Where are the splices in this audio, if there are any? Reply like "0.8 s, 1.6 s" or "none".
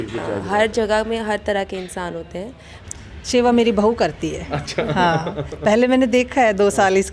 2.8 s